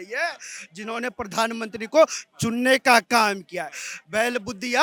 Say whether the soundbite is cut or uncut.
uncut